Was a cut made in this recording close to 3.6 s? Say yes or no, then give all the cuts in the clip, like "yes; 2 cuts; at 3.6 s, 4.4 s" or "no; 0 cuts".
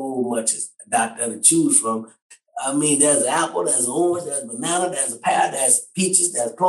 no; 1 cut; at 2.2 s